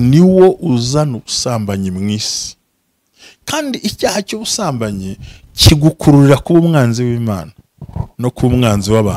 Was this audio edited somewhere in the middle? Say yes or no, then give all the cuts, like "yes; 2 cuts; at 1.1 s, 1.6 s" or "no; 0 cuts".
no; 0 cuts